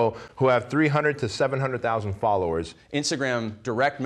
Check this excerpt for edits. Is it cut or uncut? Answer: cut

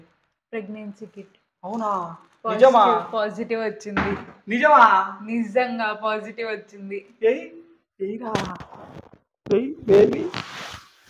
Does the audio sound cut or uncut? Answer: uncut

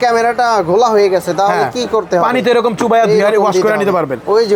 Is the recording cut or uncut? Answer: uncut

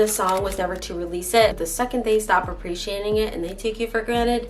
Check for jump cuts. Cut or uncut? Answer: cut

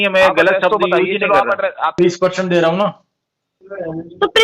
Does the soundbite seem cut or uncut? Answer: cut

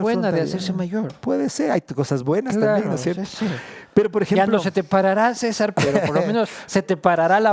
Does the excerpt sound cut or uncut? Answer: uncut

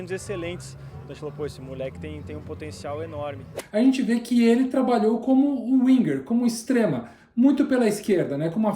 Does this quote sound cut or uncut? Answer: cut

